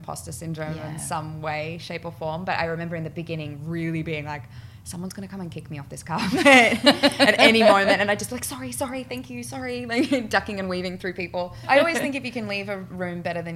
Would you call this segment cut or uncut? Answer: cut